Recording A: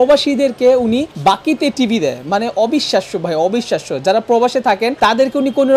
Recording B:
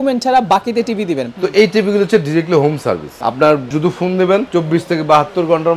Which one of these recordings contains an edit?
B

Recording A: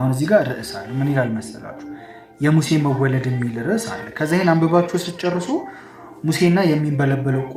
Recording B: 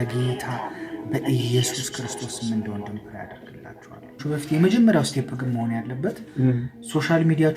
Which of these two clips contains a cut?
B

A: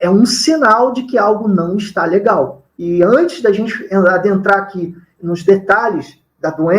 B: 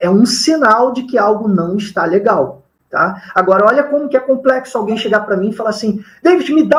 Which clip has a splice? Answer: A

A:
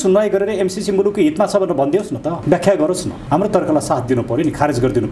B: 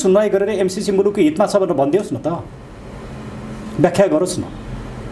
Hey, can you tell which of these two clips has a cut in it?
A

